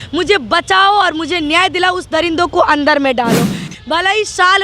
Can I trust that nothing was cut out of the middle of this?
no; 1 cut; at 3.7 s

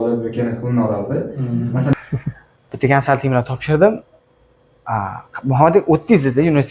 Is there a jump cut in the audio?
yes; 1 cut; at 1.9 s

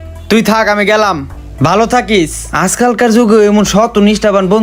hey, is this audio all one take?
yes; 0 cuts

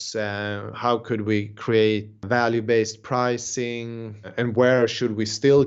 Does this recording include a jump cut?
yes; 2 cuts; at 2.2 s, 4.3 s

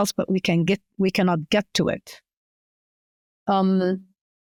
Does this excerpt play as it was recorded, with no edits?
yes; 0 cuts

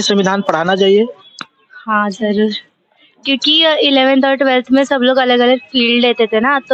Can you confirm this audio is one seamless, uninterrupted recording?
yes; 0 cuts

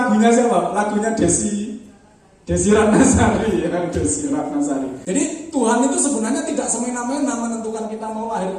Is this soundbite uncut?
no; 1 cut; at 5.0 s

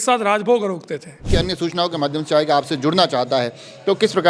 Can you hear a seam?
yes; 1 cut; at 1.3 s

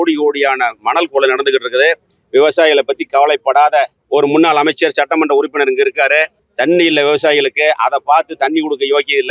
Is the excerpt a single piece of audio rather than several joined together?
yes; 0 cuts

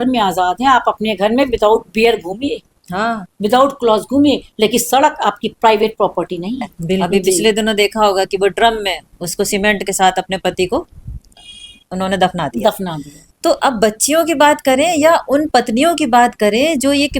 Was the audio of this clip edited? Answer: yes; 1 cut; at 7.0 s

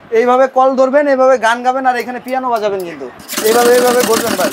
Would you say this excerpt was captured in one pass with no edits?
no; 1 cut; at 3.1 s

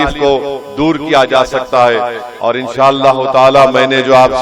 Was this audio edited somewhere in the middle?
yes; 1 cut; at 2.2 s

